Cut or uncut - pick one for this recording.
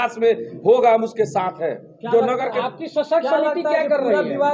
uncut